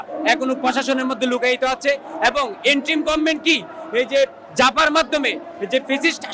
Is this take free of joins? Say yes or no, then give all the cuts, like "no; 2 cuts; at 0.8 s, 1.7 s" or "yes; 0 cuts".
yes; 0 cuts